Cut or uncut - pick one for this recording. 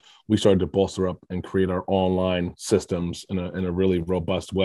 uncut